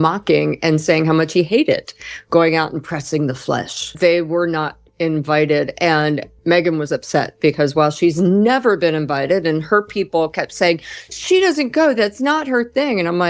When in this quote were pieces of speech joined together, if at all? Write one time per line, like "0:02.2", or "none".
0:03.8

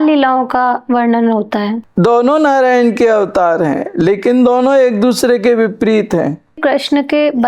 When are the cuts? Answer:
0:01.8
0:06.6

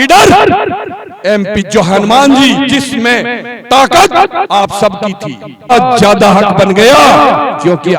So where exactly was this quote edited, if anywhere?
0:05.7

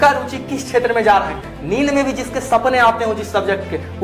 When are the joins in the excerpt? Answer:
0:01.4

